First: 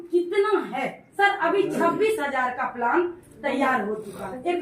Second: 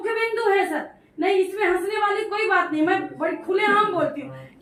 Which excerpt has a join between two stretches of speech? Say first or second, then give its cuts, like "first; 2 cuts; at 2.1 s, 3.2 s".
first; 1 cut; at 1.0 s